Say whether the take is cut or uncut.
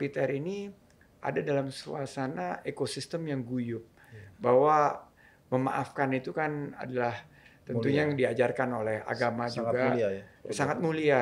uncut